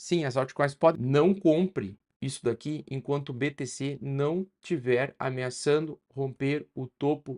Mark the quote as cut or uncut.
cut